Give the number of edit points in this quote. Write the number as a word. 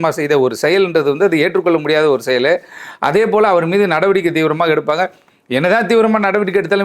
zero